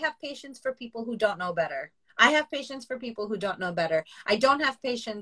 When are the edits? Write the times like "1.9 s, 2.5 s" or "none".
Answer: 2.0 s